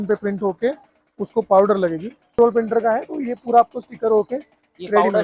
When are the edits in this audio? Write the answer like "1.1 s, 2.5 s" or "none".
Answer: 2.4 s